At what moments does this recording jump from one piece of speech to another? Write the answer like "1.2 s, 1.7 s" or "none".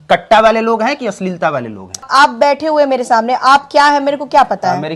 2.1 s